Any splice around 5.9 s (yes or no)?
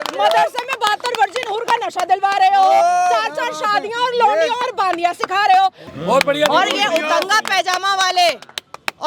yes